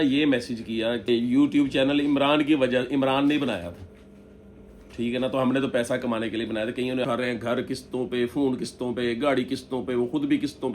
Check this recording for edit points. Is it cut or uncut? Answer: cut